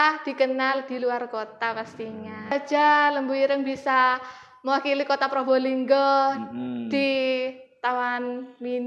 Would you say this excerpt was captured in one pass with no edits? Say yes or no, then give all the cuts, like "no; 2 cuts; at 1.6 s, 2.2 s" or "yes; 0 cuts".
no; 1 cut; at 2.5 s